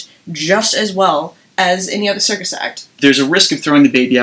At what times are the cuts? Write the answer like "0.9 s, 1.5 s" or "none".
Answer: 2.8 s